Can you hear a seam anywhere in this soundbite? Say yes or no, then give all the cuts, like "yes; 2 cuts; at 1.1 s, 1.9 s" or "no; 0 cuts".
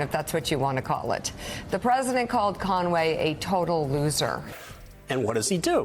yes; 1 cut; at 4.5 s